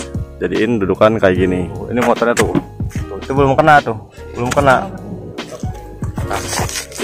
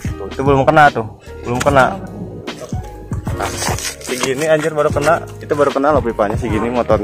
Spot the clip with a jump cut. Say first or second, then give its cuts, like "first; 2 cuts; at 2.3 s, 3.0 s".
first; 1 cut; at 1.8 s